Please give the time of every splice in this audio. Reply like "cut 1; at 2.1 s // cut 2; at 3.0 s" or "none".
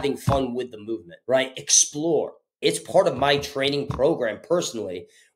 cut 1; at 1.1 s // cut 2; at 2.6 s